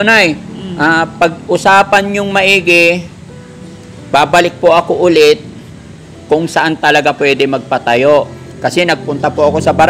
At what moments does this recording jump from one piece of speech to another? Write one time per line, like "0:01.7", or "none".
none